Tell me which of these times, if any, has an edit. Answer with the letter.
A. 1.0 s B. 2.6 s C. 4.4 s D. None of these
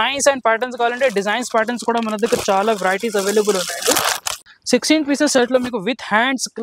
C